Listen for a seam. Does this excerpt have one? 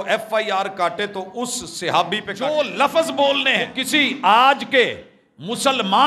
yes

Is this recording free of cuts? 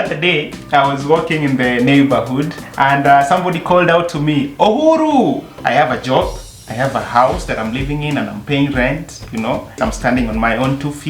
no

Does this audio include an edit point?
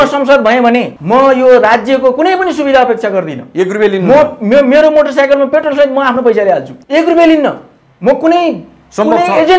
yes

